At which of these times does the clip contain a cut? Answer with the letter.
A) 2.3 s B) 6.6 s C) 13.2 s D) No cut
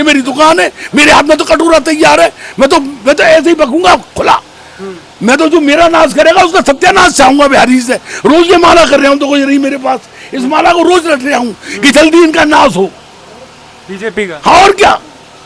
D